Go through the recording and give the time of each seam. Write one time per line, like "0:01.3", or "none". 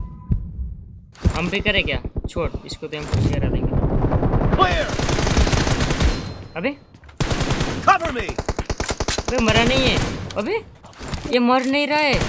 none